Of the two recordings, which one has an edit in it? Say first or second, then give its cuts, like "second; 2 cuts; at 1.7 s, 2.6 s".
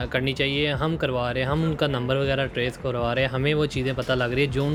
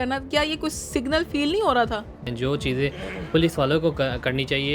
second; 1 cut; at 2.2 s